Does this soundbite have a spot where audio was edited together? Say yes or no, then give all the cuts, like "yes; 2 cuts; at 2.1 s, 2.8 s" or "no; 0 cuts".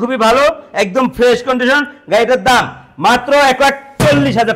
no; 0 cuts